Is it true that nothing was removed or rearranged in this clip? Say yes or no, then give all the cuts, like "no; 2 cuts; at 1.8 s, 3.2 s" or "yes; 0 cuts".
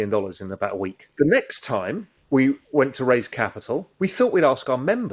no; 3 cuts; at 1.0 s, 2.1 s, 3.9 s